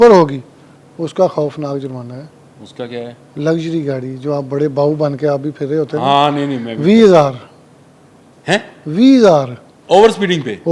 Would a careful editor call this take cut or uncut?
uncut